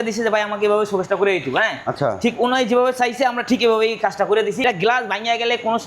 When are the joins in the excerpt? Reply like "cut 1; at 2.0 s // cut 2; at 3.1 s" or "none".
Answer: cut 1; at 4.6 s